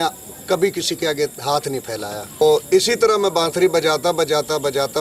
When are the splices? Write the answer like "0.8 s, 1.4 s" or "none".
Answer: 2.4 s